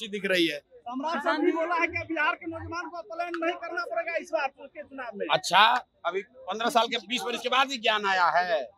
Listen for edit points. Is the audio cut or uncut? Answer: uncut